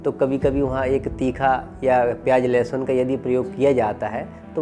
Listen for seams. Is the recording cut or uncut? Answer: uncut